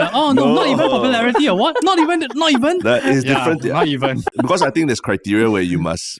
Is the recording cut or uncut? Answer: cut